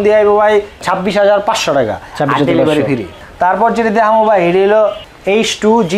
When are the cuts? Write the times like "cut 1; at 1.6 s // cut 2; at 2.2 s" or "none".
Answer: none